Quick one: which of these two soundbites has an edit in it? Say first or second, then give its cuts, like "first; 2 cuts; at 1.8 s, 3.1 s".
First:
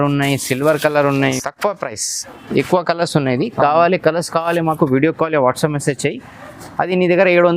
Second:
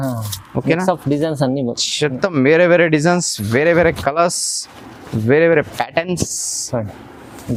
first; 1 cut; at 1.4 s